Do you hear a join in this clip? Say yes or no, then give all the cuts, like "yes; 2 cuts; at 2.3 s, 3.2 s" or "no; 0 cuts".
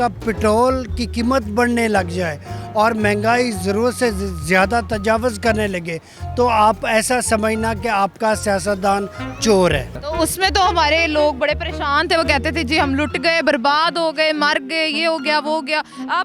yes; 1 cut; at 10.0 s